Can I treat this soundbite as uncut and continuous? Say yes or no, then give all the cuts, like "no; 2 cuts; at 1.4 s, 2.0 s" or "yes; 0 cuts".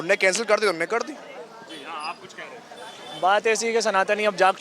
yes; 0 cuts